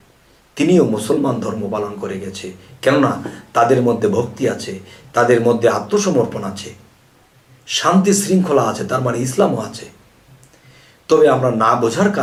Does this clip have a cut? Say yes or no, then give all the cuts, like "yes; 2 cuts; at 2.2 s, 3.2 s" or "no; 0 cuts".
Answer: no; 0 cuts